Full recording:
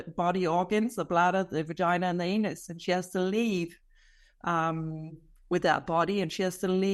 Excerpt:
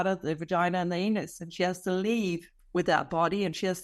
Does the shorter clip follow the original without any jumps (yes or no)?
no